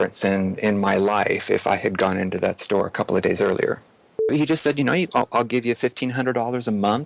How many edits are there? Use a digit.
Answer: 1